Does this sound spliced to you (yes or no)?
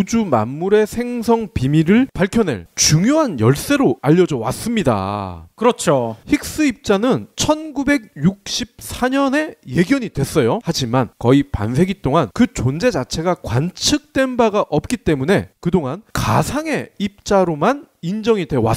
no